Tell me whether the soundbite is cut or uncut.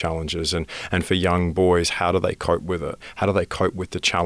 cut